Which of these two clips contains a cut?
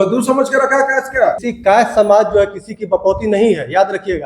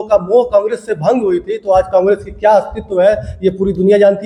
first; 1 cut; at 1.5 s

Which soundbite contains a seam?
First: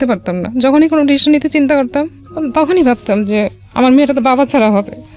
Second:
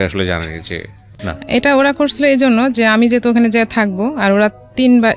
second; 1 cut; at 1.3 s

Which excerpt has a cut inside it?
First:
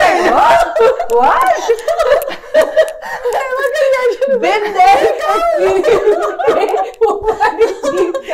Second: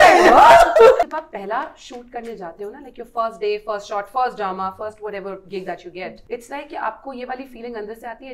second; 2 cuts; at 1.0 s, 6.2 s

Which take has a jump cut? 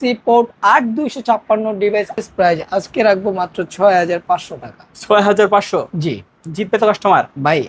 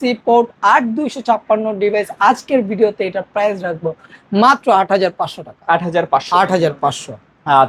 first; 1 cut; at 2.2 s

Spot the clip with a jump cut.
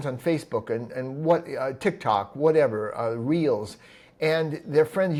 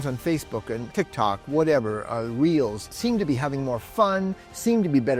second; 2 cuts; at 0.9 s, 2.9 s

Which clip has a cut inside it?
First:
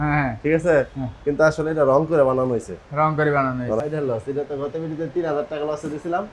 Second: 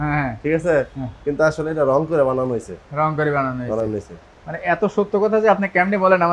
first; 1 cut; at 3.8 s

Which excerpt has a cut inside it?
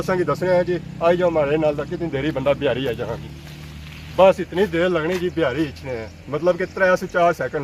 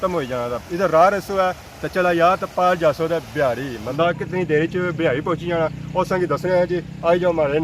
second; 1 cut; at 3.9 s

